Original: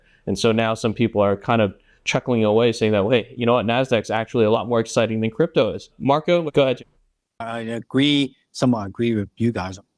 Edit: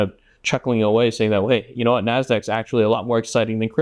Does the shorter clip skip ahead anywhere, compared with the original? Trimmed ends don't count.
no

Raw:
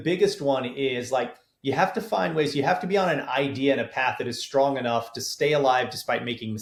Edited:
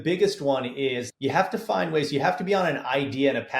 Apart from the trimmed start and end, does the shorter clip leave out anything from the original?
yes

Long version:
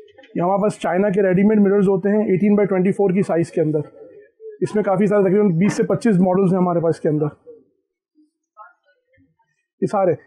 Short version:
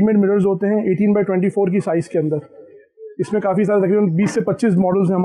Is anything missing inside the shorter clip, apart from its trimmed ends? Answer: no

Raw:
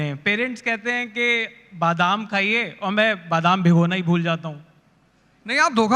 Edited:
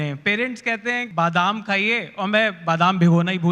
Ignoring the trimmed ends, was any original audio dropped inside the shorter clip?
yes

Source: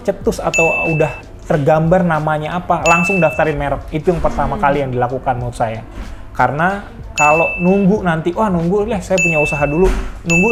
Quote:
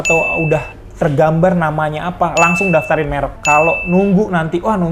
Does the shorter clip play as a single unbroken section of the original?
no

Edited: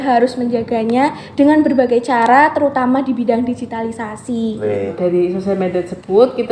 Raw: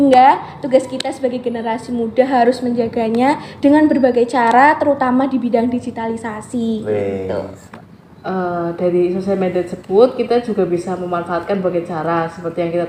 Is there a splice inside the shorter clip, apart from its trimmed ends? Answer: yes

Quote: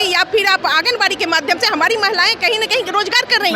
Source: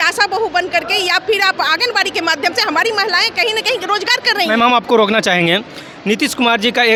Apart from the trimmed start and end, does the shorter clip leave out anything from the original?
no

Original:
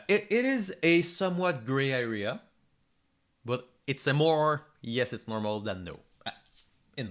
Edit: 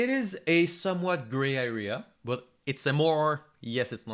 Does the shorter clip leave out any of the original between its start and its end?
yes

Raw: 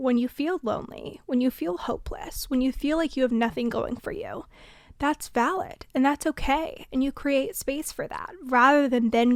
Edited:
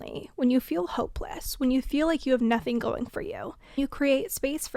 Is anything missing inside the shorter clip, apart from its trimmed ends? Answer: yes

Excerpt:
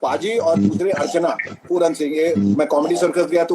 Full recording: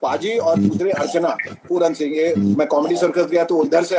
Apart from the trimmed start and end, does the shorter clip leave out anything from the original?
no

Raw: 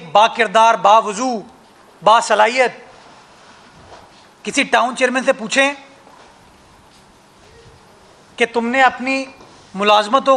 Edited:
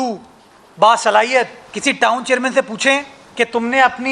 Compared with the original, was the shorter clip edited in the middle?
yes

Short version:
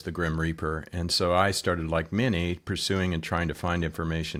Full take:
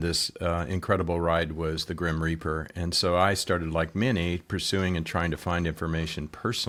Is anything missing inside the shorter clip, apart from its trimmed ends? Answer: no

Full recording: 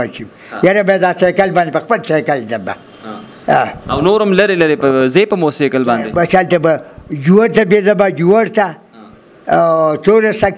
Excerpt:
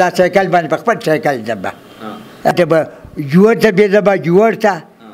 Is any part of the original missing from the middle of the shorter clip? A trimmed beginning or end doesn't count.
yes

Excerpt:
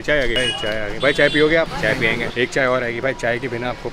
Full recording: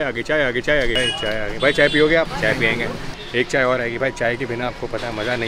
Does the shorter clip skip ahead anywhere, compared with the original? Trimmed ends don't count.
yes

